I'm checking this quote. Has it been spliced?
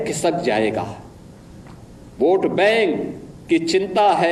no; 0 cuts

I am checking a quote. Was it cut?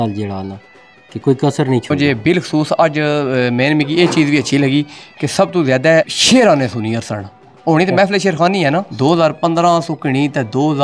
yes; 2 cuts; at 1.9 s, 8.9 s

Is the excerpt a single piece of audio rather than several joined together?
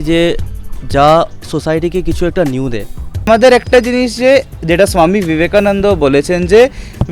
no; 1 cut; at 3.3 s

